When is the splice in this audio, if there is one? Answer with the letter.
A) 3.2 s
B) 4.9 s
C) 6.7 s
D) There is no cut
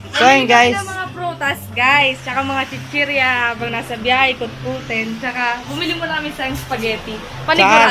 D